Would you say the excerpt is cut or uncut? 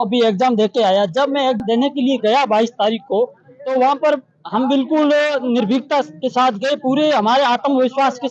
cut